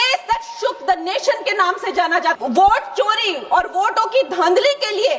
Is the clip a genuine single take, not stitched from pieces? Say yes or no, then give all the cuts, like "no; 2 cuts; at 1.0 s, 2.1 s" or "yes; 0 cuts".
no; 1 cut; at 2.4 s